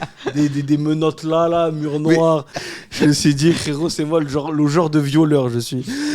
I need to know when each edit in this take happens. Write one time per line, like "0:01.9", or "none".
0:02.5